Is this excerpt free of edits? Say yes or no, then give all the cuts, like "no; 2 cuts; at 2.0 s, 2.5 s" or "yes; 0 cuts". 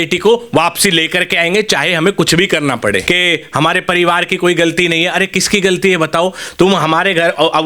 no; 1 cut; at 3.0 s